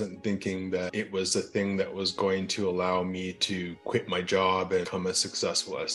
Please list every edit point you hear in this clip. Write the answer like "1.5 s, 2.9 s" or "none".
0.9 s, 4.9 s